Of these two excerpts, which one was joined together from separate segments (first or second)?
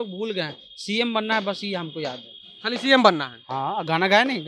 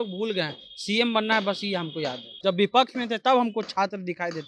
second